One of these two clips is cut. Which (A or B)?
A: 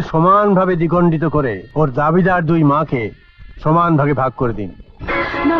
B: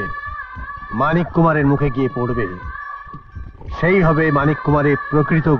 A